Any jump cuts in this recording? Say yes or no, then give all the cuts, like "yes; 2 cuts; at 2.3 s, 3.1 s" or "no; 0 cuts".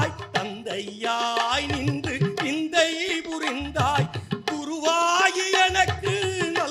no; 0 cuts